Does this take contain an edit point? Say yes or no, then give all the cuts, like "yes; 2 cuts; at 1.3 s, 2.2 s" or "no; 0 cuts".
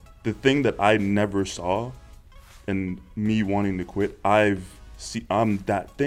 no; 0 cuts